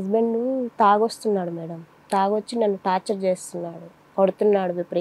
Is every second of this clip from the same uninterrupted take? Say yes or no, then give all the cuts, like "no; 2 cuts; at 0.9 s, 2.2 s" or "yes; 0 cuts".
yes; 0 cuts